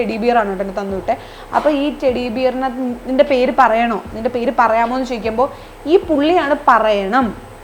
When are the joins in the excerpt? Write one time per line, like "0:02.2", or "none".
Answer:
none